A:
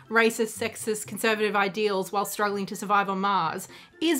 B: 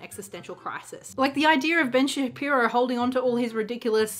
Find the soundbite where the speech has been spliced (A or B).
B